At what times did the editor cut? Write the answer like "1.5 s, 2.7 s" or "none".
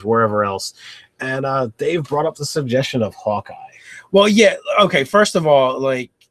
none